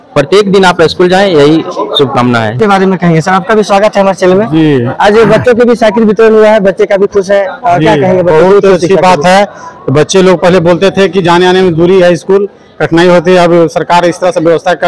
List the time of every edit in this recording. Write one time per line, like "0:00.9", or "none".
none